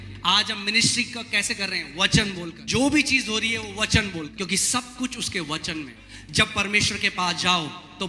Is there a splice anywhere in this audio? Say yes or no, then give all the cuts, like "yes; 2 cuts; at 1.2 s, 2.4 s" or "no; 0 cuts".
yes; 3 cuts; at 2.6 s, 4.3 s, 6.0 s